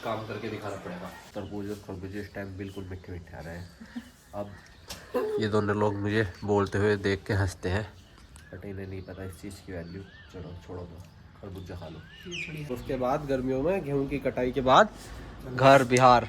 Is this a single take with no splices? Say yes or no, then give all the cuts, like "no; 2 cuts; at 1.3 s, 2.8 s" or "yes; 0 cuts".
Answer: no; 2 cuts; at 1.2 s, 12.8 s